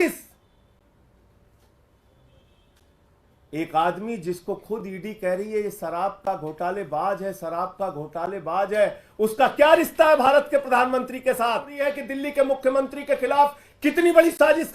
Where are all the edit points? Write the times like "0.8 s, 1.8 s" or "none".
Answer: 12.0 s

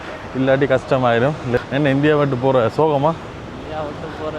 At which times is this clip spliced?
1.6 s

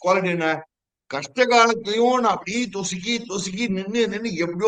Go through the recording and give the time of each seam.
none

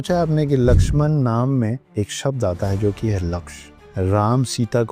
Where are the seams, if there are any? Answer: 1.8 s, 3.7 s

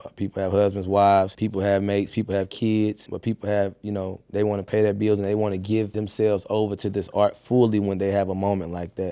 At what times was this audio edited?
1.4 s, 3.1 s, 5.9 s

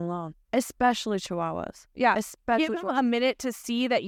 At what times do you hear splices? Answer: none

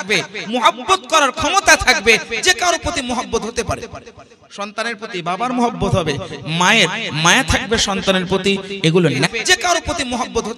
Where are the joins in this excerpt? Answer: 9.3 s

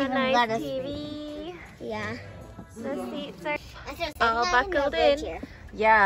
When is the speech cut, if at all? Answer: 3.6 s

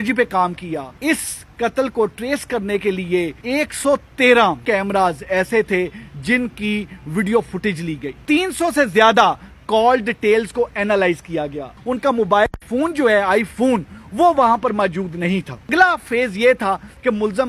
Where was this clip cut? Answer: 0.9 s, 3.4 s, 4.6 s, 8.1 s, 11.7 s, 15.7 s

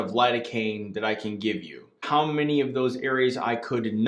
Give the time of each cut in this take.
2.0 s

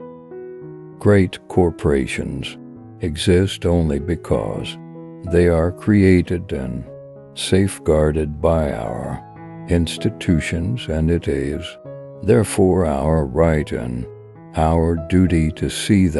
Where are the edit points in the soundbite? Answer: 1.0 s

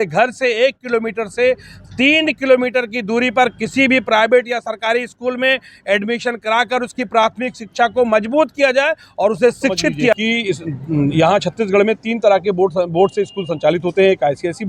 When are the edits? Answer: 10.1 s

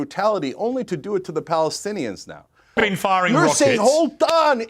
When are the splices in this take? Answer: 2.8 s

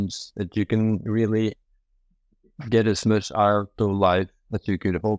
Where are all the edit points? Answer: none

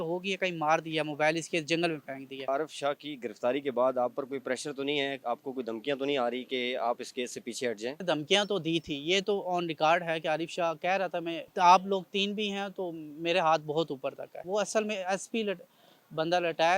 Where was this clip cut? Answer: 2.5 s, 7.9 s, 11.4 s, 14.4 s

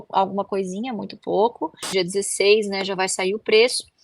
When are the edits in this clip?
1.9 s

